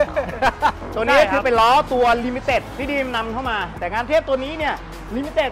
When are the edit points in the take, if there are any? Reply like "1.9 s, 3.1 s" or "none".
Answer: 0.8 s, 2.7 s, 3.7 s